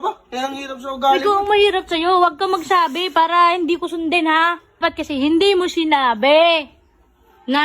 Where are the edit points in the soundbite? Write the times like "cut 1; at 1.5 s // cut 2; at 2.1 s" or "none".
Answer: cut 1; at 4.8 s

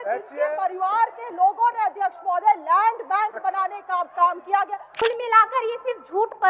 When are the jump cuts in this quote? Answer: cut 1; at 5.0 s

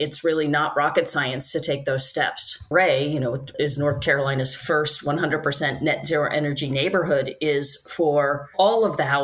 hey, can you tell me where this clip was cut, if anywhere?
cut 1; at 2.7 s // cut 2; at 3.5 s

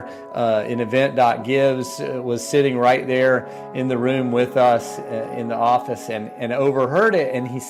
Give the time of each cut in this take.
none

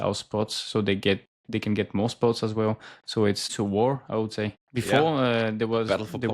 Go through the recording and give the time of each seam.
cut 1; at 3.5 s // cut 2; at 4.6 s

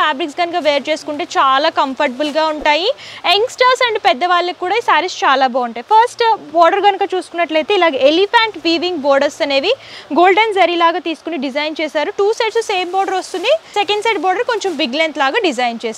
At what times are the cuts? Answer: none

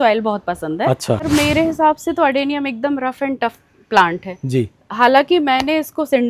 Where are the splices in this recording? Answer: cut 1; at 1.3 s

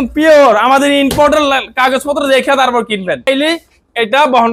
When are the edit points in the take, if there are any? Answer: cut 1; at 3.3 s

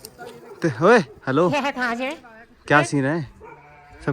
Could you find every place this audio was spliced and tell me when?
cut 1; at 2.2 s

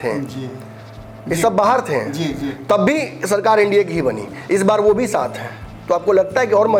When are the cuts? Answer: none

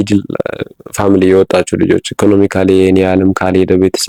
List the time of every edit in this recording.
none

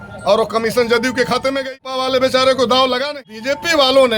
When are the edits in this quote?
cut 1; at 1.8 s // cut 2; at 3.2 s

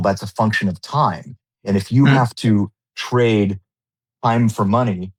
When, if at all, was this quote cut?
none

